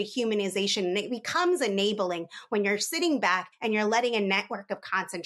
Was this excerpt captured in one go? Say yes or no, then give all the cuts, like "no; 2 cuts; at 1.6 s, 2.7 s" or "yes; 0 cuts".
yes; 0 cuts